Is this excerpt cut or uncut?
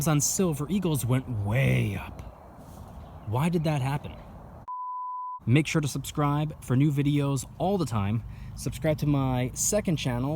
cut